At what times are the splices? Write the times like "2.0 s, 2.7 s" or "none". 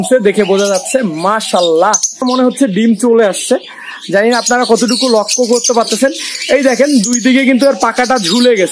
2.2 s

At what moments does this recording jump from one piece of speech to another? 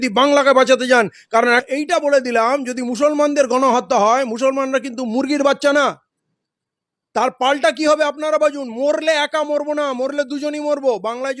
1.6 s

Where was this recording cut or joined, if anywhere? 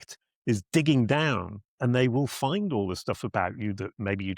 none

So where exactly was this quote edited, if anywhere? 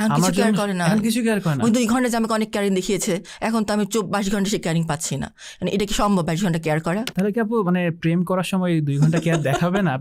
none

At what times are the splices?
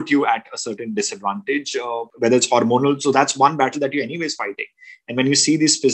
2.1 s

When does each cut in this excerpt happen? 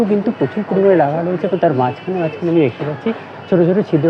none

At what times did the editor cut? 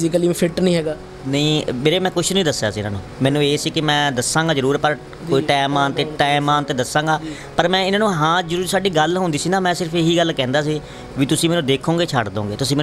none

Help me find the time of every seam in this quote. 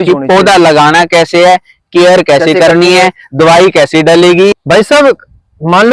4.6 s

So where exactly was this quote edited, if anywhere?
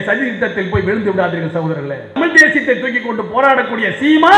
2.2 s

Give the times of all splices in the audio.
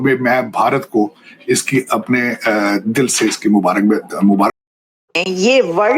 5.1 s

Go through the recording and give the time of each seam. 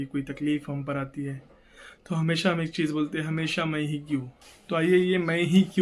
4.4 s

